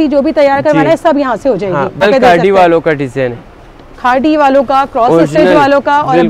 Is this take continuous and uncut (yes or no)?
no